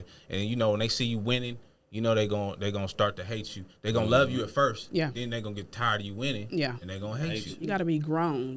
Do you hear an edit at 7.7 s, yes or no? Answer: yes